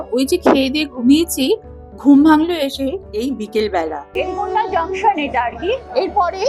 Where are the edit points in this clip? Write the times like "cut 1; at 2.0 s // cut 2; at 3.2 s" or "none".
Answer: cut 1; at 4.1 s